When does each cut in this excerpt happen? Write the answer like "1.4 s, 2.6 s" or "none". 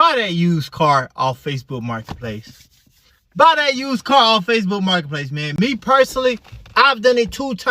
none

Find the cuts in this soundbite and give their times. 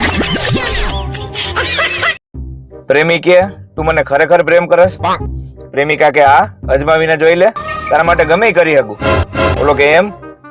2.2 s

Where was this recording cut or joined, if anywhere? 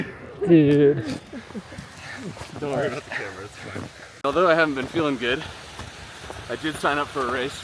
4.2 s

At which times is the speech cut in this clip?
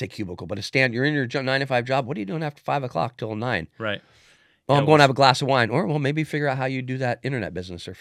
none

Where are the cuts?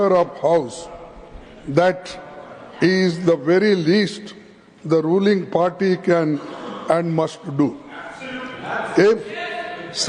none

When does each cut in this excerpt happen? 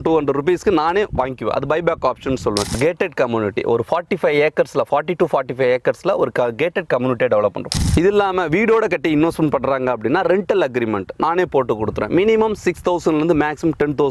2.8 s, 7.7 s

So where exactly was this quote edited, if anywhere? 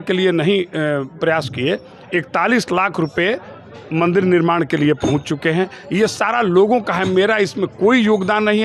none

